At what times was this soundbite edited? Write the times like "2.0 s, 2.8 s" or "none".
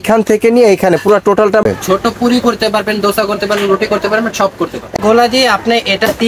1.6 s, 5.0 s